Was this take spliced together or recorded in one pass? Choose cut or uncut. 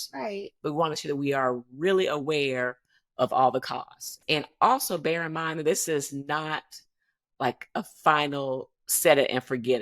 cut